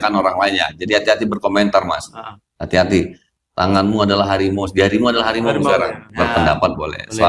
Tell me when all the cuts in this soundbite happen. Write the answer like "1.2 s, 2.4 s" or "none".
6.0 s